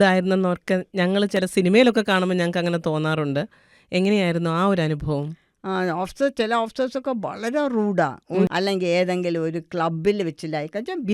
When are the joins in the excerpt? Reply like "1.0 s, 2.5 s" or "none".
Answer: 8.5 s

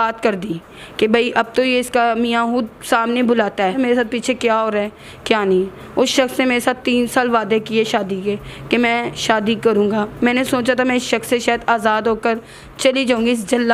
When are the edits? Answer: 3.8 s

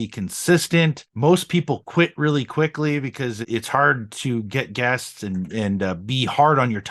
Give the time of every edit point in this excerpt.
1.0 s, 3.5 s

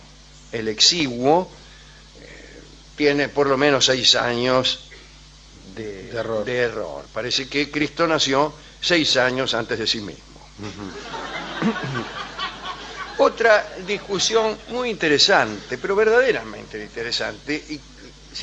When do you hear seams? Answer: 1.4 s

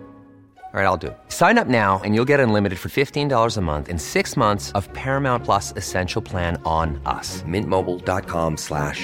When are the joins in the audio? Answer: none

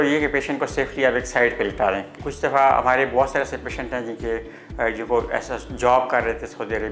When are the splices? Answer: 2.1 s

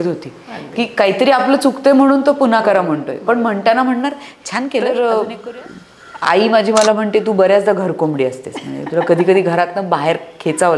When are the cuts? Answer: 4.8 s

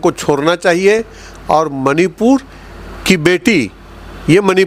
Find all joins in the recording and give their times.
none

